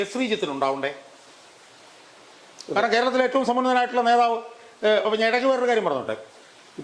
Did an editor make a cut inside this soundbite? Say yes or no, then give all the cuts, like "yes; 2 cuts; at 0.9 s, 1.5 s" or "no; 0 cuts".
no; 0 cuts